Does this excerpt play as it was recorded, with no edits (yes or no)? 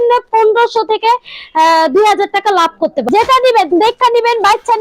no